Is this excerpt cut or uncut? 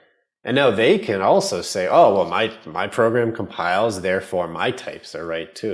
uncut